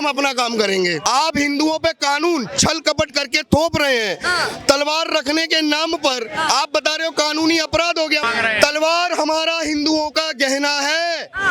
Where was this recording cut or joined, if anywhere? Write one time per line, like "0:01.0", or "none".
0:01.1
0:08.2